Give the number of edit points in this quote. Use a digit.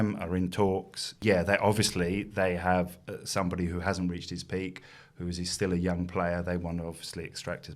1